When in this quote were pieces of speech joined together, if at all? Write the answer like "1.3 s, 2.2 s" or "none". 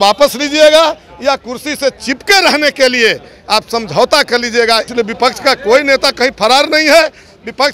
4.9 s